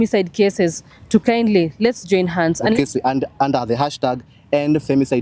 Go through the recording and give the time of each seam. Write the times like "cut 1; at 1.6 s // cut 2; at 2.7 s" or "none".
cut 1; at 2.7 s